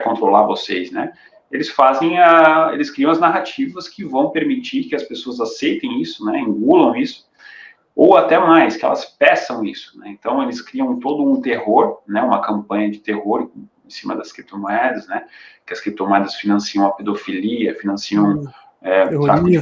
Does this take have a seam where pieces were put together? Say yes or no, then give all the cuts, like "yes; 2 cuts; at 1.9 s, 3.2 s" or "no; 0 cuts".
no; 0 cuts